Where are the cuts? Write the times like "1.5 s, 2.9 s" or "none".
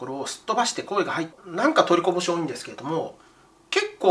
1.4 s